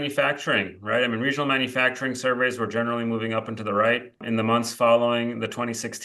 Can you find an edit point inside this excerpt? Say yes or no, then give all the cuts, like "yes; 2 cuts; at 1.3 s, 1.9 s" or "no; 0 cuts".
yes; 1 cut; at 4.2 s